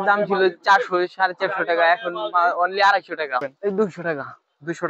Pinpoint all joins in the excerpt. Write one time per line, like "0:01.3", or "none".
0:03.5